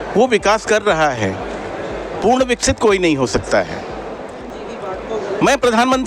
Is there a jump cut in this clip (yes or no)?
yes